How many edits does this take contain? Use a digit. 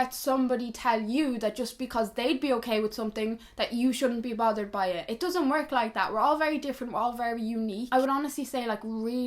0